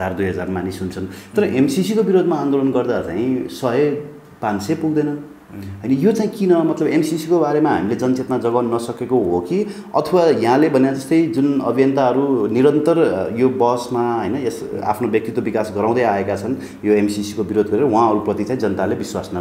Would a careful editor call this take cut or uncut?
uncut